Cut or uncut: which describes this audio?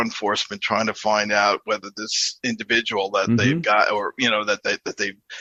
uncut